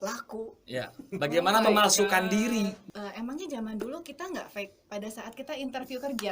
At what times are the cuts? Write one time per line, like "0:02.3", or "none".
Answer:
0:02.8